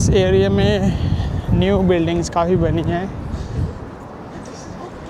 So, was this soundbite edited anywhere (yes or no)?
no